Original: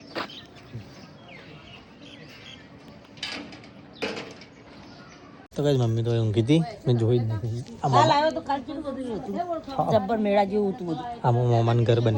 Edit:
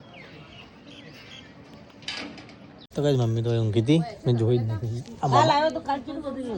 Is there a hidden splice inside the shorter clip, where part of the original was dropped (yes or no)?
yes